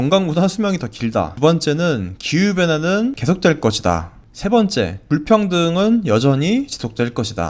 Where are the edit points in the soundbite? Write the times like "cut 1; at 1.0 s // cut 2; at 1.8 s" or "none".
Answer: cut 1; at 1.3 s // cut 2; at 3.2 s // cut 3; at 5.0 s